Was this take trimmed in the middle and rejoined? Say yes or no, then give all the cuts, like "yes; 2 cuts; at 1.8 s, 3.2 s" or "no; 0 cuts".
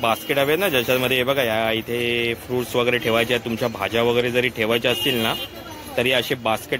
no; 0 cuts